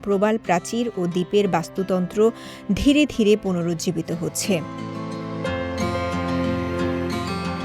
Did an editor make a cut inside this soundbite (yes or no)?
no